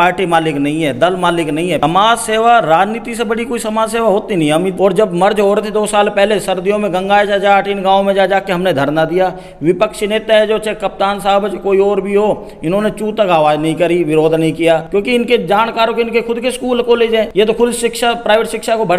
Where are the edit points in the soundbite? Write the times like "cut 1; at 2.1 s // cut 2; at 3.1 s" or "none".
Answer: cut 1; at 1.8 s // cut 2; at 4.7 s // cut 3; at 14.8 s // cut 4; at 17.3 s